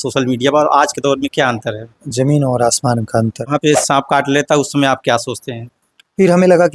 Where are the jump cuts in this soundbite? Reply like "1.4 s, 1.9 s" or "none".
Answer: 3.5 s